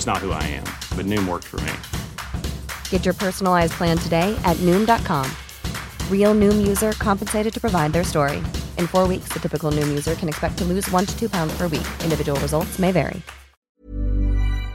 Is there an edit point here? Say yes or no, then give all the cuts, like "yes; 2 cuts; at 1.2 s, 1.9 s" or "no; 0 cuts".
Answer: yes; 1 cut; at 13.5 s